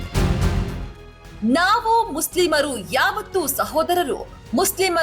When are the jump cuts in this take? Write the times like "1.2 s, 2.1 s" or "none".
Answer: 1.0 s